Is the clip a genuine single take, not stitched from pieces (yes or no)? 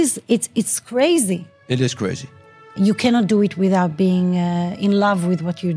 no